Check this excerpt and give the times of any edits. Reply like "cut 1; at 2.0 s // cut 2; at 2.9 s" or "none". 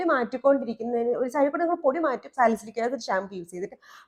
none